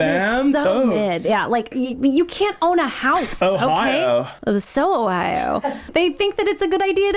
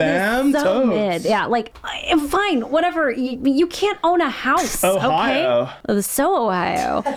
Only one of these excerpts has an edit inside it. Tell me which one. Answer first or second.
first